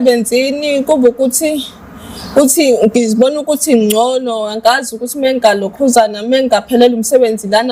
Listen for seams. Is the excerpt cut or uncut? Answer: uncut